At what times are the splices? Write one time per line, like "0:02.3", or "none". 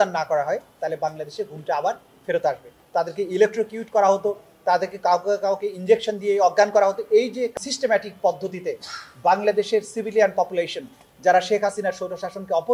0:02.7
0:07.5